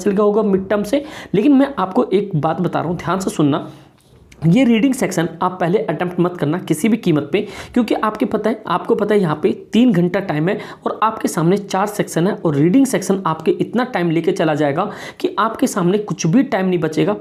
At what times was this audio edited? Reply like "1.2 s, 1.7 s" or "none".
none